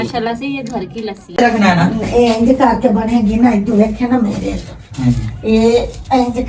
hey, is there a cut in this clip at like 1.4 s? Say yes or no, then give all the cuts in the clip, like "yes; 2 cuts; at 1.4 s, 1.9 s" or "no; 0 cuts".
yes; 1 cut; at 1.4 s